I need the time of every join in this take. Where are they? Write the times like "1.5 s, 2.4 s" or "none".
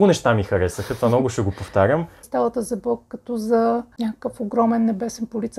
2.2 s, 3.9 s